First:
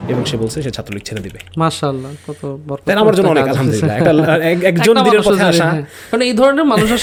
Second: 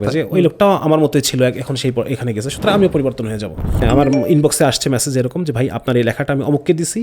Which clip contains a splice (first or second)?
second